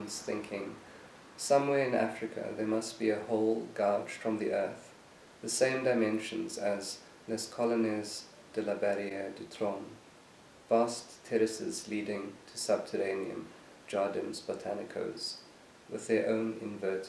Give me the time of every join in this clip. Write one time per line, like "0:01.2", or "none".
none